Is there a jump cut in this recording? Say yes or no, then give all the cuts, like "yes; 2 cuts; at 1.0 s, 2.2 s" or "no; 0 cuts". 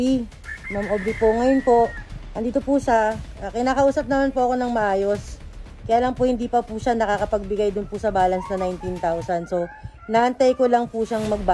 no; 0 cuts